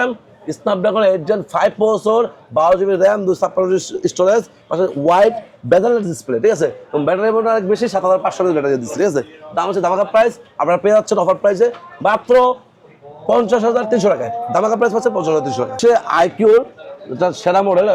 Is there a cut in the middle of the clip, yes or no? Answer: no